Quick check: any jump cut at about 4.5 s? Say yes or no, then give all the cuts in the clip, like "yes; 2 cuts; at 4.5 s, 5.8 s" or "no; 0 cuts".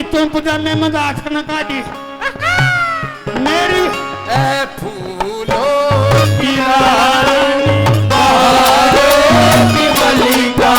no; 0 cuts